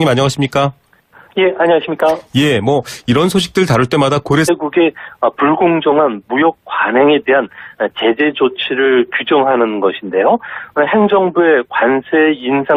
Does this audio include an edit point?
no; 0 cuts

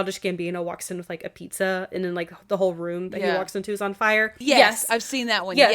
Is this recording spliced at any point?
yes; 1 cut; at 4.3 s

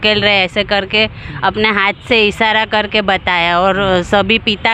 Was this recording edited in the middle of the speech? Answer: no; 0 cuts

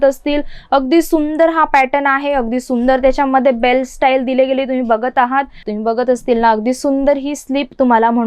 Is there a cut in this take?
yes; 1 cut; at 5.6 s

